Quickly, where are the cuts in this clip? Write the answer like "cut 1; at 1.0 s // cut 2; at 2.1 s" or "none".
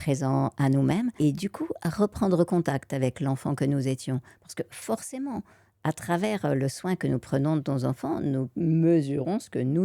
cut 1; at 1.1 s